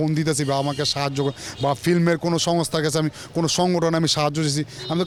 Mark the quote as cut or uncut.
uncut